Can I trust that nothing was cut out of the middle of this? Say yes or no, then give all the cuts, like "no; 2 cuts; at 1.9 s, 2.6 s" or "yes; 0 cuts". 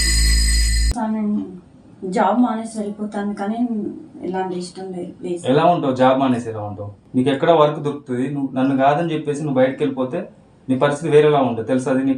no; 1 cut; at 0.9 s